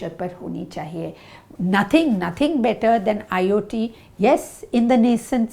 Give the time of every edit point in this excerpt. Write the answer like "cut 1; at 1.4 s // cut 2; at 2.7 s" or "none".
cut 1; at 1.5 s